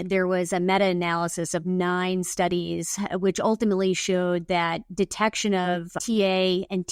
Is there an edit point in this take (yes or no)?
no